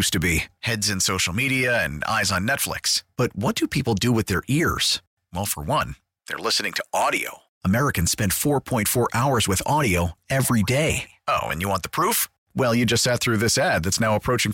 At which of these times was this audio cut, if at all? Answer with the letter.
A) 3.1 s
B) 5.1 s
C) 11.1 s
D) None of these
D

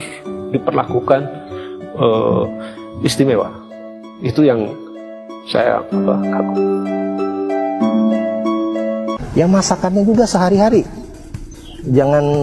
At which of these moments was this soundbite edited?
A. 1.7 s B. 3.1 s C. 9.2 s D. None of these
C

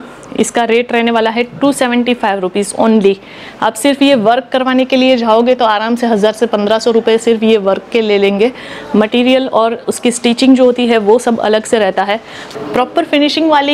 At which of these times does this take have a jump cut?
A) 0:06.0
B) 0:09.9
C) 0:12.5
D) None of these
C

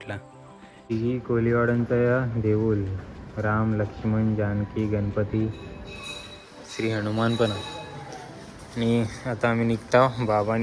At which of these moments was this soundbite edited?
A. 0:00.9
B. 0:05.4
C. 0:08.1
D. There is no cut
A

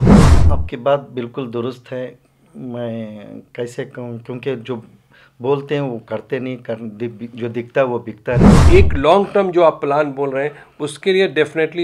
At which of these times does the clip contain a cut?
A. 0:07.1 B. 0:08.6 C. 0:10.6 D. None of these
B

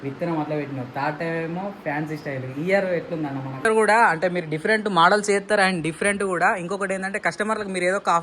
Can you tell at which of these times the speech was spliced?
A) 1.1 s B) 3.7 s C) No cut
B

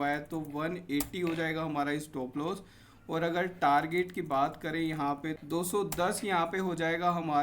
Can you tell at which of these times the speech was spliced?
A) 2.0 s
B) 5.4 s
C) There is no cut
B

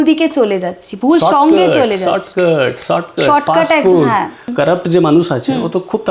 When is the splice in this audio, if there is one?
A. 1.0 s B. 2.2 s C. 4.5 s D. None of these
C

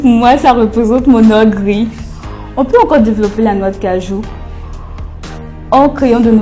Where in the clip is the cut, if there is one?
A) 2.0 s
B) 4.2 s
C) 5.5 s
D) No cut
D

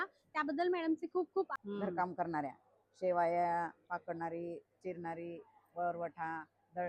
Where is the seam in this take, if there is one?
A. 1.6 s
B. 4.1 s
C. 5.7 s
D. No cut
A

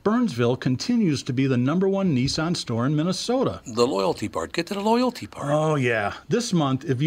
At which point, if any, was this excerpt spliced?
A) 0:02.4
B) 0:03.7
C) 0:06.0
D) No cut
D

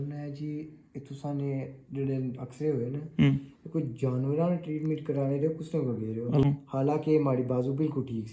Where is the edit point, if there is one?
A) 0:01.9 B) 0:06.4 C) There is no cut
B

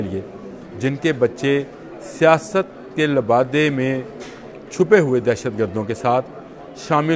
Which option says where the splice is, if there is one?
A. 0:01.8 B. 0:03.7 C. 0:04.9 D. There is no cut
D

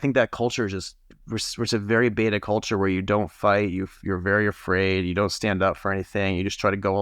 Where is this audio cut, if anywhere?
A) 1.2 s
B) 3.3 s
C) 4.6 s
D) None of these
A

